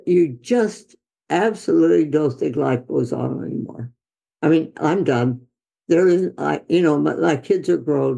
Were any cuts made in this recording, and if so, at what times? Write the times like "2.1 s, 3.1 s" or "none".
none